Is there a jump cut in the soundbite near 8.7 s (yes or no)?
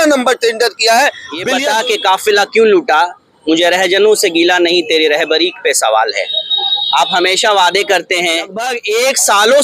yes